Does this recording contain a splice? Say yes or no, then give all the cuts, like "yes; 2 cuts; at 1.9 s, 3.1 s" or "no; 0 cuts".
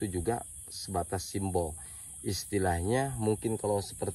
no; 0 cuts